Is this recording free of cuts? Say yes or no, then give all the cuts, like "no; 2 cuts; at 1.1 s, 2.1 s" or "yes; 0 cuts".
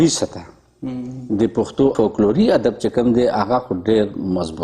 no; 1 cut; at 1.9 s